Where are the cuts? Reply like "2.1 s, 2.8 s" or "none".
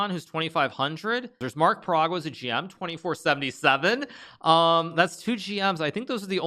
1.4 s